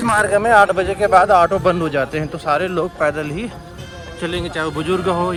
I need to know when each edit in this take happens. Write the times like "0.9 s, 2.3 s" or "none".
none